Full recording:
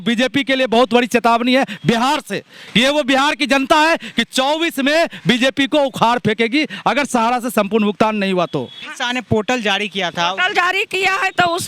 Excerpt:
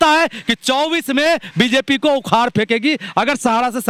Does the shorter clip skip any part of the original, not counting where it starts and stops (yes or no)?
no